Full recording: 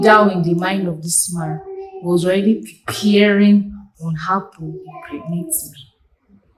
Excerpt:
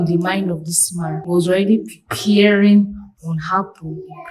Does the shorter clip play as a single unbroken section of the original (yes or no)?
no